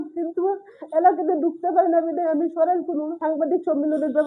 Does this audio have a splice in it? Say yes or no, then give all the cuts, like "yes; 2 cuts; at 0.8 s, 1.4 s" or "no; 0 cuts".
yes; 1 cut; at 3.2 s